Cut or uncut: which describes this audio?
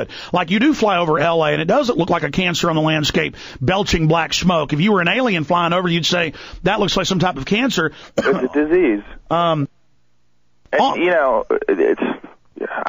cut